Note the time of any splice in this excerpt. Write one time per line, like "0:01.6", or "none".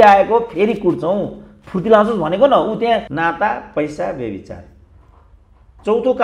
0:03.1